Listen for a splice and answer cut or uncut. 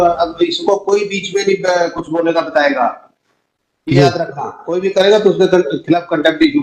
uncut